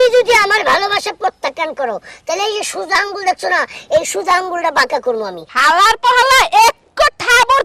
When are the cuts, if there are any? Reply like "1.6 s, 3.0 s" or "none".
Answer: 5.5 s

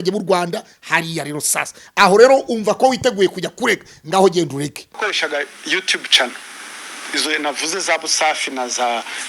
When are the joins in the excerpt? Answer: 5.0 s

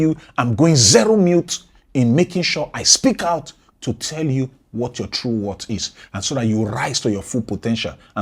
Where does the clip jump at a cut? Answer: none

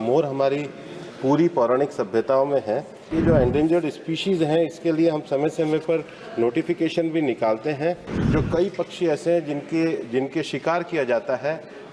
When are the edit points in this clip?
3.1 s, 8.1 s

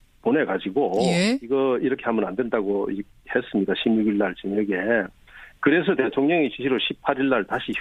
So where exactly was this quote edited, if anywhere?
none

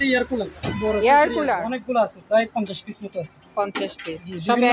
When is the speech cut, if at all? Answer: 1.6 s

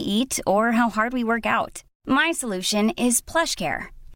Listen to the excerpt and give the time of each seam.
none

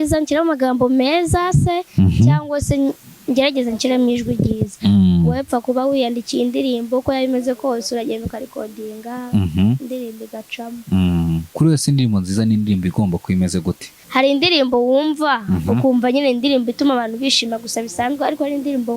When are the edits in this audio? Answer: 11.5 s, 13.9 s

